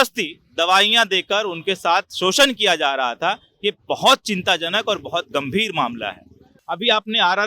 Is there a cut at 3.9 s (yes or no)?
no